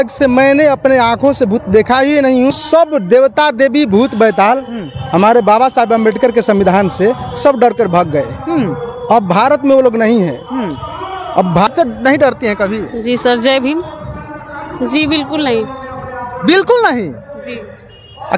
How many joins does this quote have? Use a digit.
2